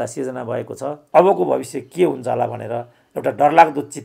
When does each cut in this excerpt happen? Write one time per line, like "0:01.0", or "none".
0:01.0